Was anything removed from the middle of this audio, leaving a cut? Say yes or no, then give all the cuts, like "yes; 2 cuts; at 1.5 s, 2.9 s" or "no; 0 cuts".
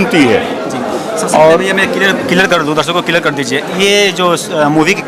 no; 0 cuts